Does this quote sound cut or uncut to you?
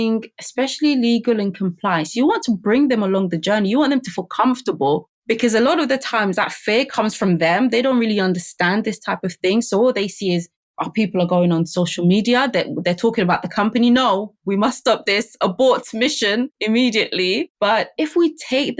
uncut